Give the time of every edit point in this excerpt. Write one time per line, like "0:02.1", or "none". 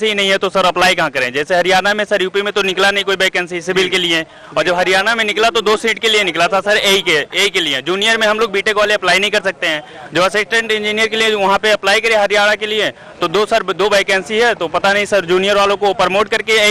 none

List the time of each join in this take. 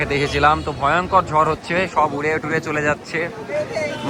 none

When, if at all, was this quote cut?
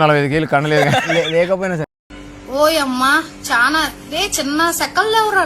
none

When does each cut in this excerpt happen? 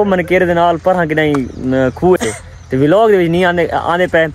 0:02.2

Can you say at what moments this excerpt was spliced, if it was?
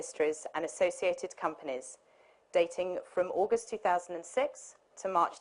0:03.1

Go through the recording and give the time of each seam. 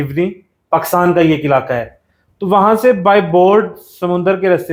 none

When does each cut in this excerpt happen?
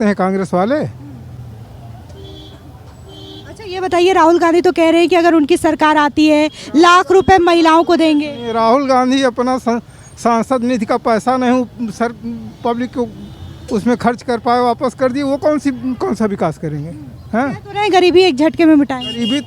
none

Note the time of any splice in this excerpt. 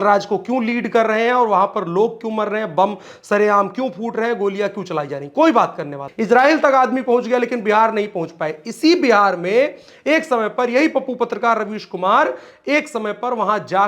0:06.0

